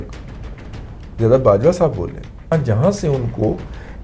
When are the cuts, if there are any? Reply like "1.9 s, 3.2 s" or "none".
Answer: 2.5 s